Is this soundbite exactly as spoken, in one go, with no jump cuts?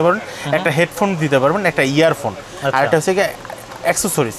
yes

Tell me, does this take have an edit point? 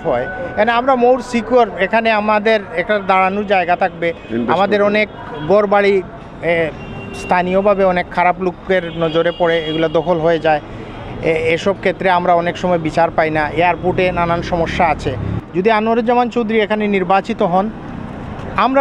no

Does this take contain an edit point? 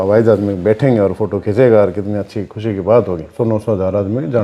yes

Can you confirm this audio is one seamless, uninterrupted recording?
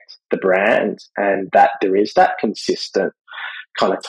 yes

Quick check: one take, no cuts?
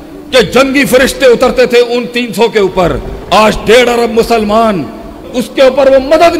no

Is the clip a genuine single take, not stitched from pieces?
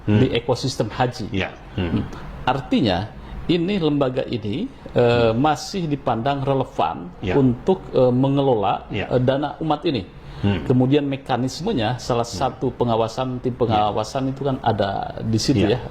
yes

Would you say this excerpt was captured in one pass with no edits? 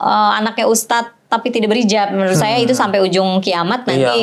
yes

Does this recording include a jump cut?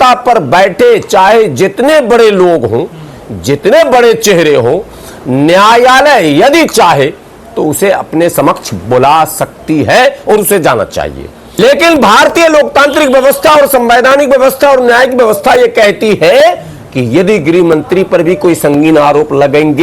yes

